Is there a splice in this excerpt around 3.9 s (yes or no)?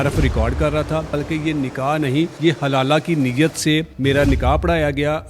yes